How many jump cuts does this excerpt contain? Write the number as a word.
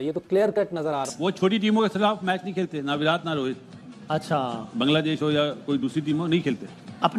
one